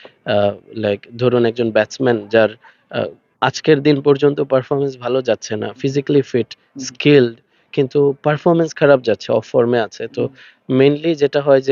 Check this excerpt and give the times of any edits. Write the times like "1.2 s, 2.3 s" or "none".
none